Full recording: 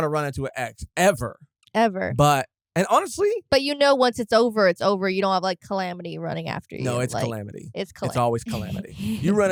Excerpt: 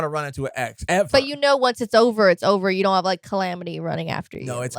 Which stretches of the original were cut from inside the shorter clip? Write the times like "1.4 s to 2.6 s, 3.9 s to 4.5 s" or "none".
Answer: 1.0 s to 3.4 s